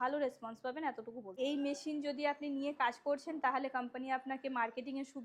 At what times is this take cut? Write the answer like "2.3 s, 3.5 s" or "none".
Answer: 1.3 s